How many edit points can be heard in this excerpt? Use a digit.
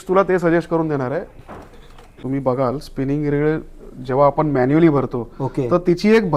1